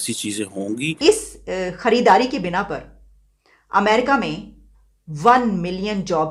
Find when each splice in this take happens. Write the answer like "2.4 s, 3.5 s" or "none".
1.0 s